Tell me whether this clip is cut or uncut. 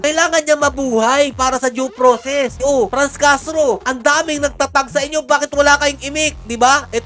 cut